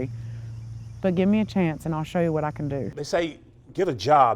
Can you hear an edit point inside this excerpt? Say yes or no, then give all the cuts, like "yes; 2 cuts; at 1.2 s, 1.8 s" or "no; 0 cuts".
yes; 1 cut; at 2.9 s